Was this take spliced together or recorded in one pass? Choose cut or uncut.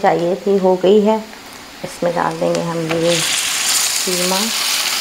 uncut